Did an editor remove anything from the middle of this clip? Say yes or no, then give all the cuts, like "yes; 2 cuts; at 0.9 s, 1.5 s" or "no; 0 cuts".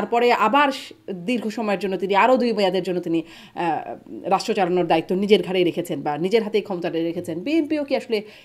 no; 0 cuts